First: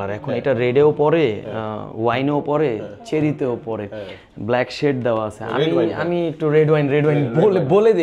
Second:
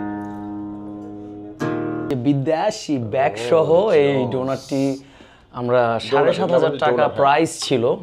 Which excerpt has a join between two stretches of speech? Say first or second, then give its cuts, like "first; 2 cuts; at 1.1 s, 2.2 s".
second; 1 cut; at 2.1 s